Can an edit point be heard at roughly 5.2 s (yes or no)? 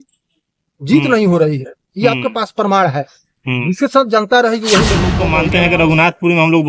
yes